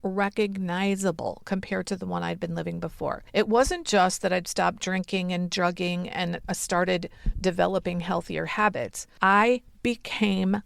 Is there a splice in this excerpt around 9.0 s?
yes; 2 cuts; at 3.2 s, 9.0 s

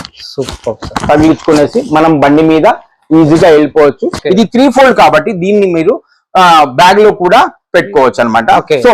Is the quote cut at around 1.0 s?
no; 1 cut; at 4.2 s

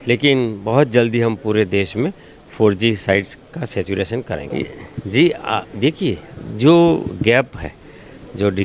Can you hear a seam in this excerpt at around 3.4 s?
no; 0 cuts

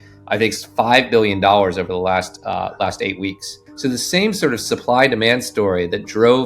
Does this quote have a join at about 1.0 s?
no; 1 cut; at 3.6 s

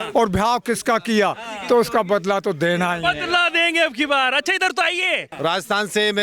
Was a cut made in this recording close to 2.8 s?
no; 1 cut; at 5.3 s

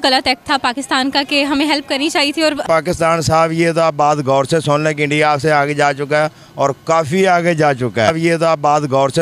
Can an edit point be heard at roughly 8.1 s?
yes; 2 cuts; at 2.6 s, 8.1 s

